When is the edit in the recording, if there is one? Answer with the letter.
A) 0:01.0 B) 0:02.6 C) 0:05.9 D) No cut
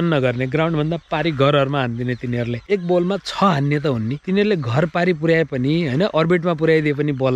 B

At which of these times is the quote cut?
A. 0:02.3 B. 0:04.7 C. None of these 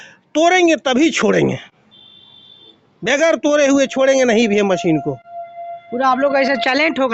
C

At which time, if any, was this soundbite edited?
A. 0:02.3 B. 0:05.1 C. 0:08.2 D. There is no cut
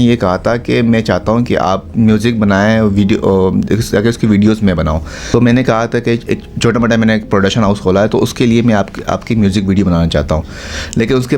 B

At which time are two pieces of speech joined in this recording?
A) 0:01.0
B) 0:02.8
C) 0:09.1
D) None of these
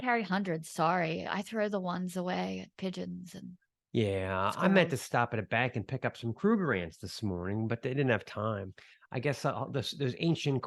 D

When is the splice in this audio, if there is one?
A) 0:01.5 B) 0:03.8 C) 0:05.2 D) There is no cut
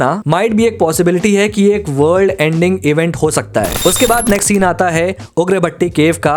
B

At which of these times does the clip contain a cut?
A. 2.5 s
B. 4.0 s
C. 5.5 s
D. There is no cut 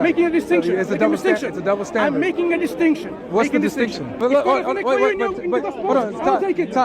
B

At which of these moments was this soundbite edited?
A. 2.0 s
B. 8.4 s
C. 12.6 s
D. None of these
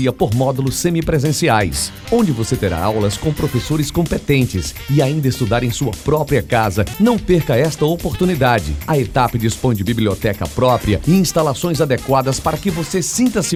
D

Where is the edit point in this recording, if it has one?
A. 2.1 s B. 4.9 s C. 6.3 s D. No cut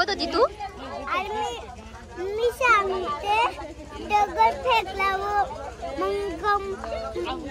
D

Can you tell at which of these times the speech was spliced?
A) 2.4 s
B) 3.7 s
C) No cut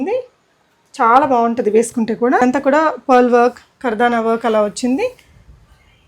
A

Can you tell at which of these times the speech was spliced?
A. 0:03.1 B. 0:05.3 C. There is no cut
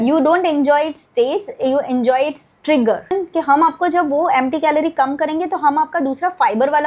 A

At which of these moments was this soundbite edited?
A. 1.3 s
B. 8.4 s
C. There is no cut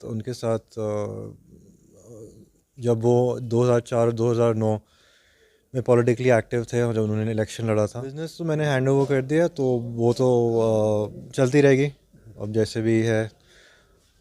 B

